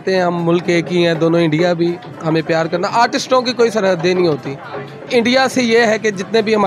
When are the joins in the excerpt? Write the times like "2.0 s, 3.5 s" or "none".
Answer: 5.1 s

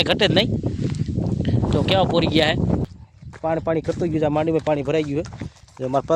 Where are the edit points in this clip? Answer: 2.8 s

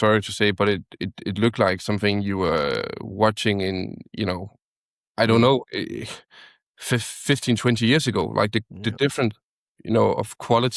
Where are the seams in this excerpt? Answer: none

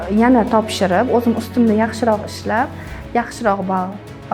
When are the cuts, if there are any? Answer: none

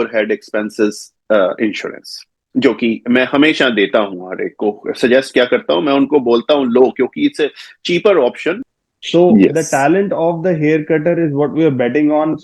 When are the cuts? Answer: 8.7 s

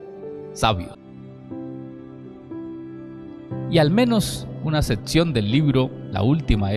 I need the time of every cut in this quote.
1.0 s

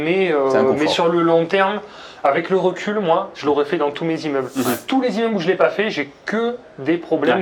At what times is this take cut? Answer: none

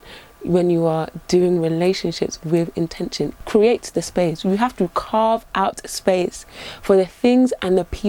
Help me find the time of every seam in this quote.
3.3 s

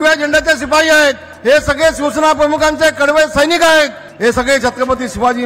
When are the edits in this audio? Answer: 1.3 s, 4.0 s

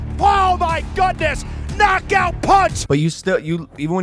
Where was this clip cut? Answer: 2.8 s

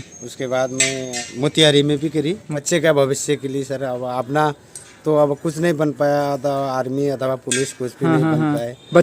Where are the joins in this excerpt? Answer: 1.2 s, 2.6 s

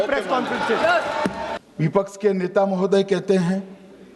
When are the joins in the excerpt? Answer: 1.5 s

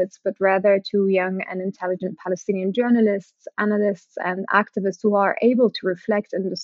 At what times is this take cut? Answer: none

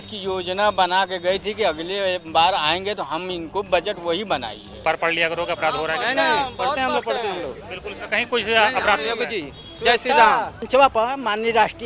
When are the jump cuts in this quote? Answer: 4.8 s, 10.6 s

